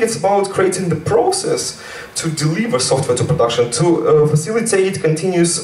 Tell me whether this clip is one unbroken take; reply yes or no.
yes